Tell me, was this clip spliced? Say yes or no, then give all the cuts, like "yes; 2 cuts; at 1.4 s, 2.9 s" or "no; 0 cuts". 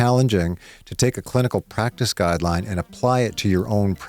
no; 0 cuts